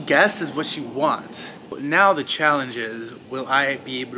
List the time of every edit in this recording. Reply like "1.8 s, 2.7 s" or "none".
1.8 s